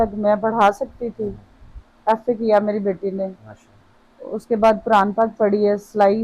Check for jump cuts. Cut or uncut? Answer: uncut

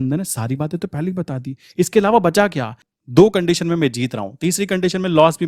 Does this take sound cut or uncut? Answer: cut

